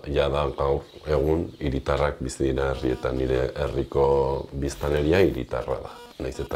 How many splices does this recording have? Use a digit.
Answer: 0